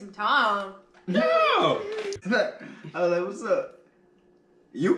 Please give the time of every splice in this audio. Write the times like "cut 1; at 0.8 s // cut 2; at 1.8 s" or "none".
cut 1; at 2.2 s

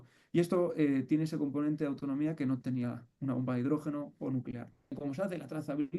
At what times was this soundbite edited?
cut 1; at 5.0 s

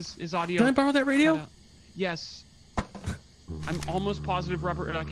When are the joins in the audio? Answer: none

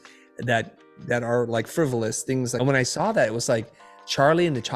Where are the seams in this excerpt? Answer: cut 1; at 2.6 s

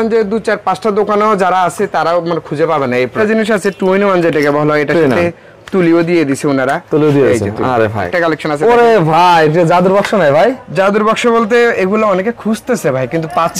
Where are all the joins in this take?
cut 1; at 3.1 s // cut 2; at 8.1 s

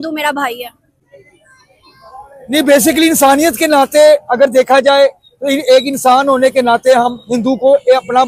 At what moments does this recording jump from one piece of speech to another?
none

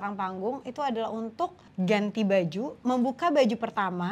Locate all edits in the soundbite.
cut 1; at 1.6 s

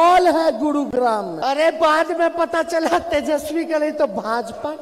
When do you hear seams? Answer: cut 1; at 1.3 s

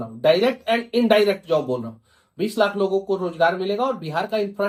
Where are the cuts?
none

